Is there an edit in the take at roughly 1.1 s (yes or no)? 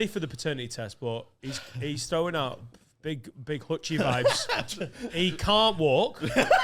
no